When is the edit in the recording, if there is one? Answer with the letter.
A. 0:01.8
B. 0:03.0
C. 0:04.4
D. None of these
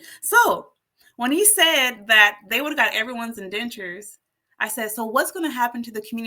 D